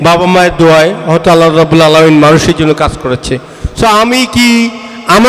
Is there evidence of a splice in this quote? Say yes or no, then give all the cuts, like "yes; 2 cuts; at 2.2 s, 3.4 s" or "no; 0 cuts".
no; 0 cuts